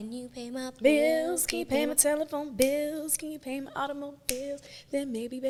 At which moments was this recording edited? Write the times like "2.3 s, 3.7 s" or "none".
none